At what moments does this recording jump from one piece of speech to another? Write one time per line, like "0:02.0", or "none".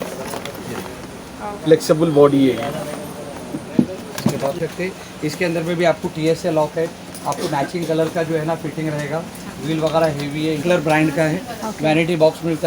0:04.6
0:10.6